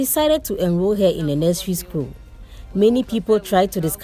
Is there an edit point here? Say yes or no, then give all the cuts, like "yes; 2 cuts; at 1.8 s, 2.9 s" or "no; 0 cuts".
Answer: yes; 1 cut; at 2.6 s